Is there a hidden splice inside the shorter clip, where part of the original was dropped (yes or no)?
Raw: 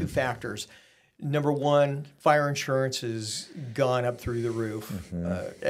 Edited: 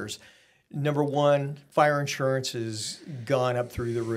no